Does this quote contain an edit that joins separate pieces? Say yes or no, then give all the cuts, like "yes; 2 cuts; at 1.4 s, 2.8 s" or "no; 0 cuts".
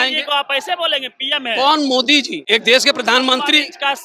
yes; 1 cut; at 2.4 s